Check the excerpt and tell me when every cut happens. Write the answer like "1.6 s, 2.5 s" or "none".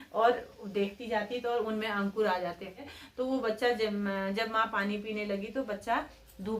3.0 s